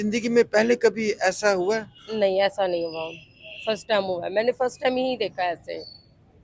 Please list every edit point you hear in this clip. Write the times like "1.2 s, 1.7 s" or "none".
none